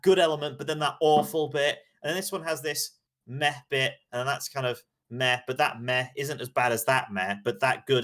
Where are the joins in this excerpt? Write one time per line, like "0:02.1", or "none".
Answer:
none